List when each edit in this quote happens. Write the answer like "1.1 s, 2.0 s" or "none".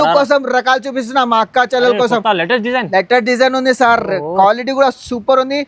none